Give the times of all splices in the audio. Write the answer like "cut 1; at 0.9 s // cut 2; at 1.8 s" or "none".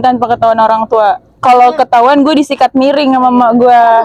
none